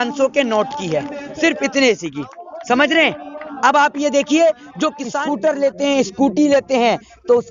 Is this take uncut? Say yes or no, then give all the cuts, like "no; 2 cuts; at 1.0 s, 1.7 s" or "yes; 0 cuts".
no; 1 cut; at 5.1 s